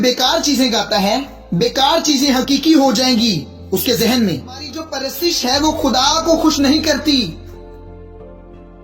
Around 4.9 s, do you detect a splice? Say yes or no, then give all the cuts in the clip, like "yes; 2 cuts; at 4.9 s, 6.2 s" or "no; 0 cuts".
yes; 1 cut; at 4.9 s